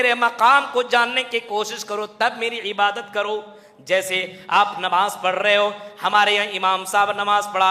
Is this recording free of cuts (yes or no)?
yes